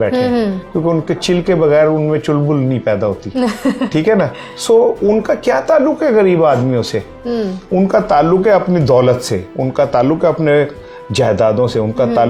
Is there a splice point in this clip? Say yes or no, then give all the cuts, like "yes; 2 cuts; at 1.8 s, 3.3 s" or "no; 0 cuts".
no; 0 cuts